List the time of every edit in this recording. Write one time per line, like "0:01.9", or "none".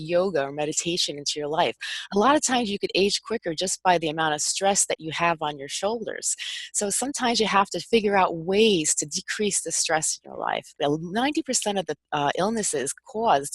0:10.8